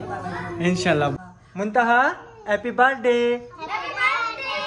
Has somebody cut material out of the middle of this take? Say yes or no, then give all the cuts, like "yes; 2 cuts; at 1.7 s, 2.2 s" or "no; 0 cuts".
yes; 1 cut; at 1.2 s